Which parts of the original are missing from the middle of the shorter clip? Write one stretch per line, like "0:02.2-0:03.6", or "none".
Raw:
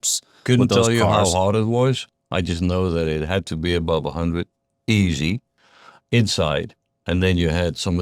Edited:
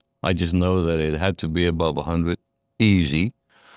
none